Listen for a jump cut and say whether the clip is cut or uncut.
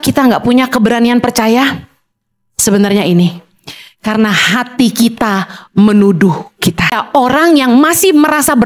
cut